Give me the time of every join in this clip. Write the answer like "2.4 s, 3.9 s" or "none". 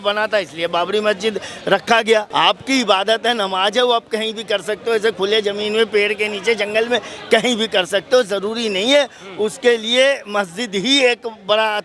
2.3 s

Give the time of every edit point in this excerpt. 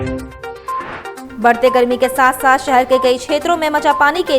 1.2 s

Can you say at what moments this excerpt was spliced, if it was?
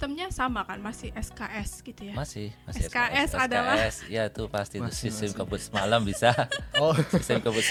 none

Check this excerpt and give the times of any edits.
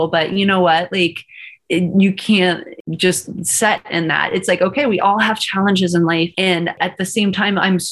2.7 s

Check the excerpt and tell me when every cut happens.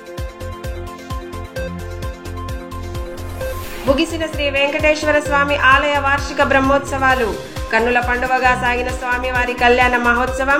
none

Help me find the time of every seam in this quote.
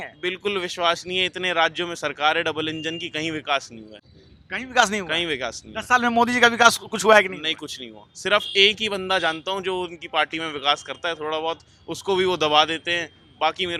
none

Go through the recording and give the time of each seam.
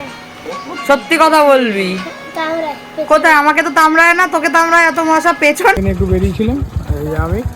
5.8 s

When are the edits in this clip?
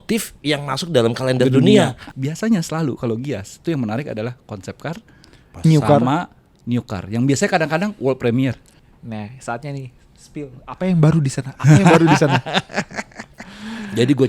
2.0 s, 8.8 s

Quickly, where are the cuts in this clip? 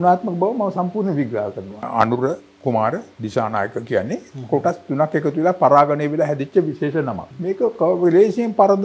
1.8 s, 7.3 s

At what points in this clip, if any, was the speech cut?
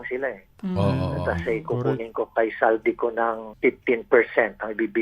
3.5 s

